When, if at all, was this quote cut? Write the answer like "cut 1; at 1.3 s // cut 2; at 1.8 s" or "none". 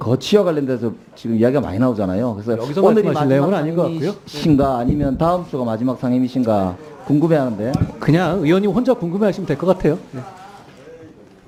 none